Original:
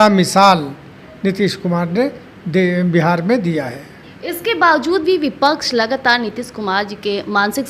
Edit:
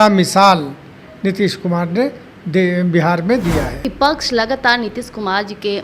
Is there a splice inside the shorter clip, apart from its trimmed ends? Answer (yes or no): yes